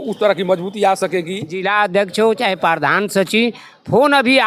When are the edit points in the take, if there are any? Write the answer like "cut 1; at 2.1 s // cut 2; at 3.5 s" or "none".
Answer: cut 1; at 1.5 s